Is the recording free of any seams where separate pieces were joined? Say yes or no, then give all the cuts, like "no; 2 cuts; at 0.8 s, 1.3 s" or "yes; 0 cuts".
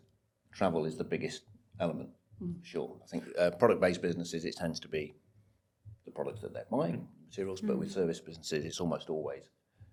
yes; 0 cuts